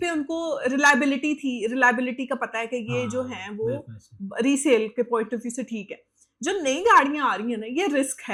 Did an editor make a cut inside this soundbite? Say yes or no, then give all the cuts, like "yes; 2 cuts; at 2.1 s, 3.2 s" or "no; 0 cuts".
no; 0 cuts